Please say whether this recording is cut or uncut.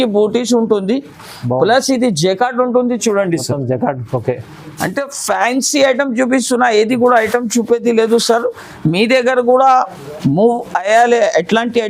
uncut